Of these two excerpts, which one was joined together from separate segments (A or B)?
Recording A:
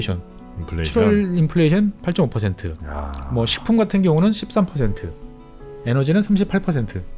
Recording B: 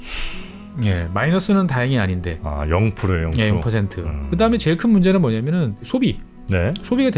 B